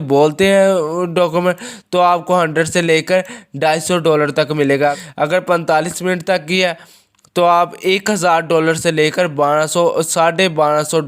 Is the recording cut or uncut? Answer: cut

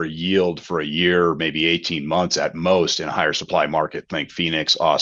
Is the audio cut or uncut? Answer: uncut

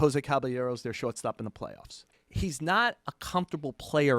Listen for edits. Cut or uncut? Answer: cut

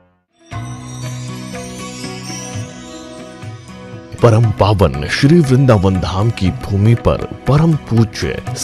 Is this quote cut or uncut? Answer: cut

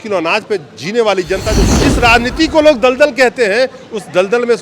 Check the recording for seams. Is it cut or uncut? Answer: cut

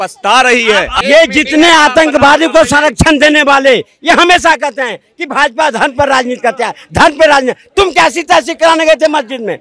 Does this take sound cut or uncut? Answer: cut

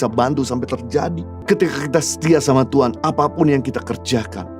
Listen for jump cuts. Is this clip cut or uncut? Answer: cut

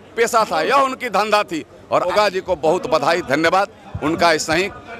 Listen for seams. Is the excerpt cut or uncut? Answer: cut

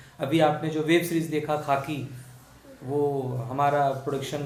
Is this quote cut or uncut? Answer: uncut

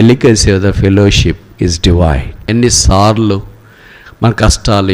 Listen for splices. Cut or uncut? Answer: cut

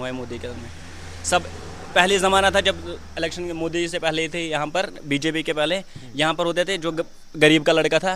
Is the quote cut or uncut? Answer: uncut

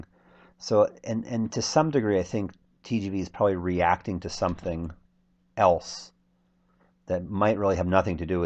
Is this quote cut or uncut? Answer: cut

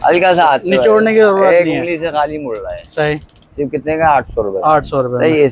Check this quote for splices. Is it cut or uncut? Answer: uncut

